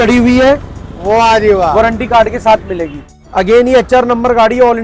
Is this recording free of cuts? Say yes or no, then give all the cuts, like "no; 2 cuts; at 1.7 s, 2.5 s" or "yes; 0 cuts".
no; 1 cut; at 3.1 s